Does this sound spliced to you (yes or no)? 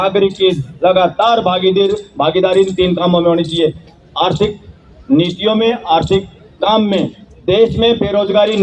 no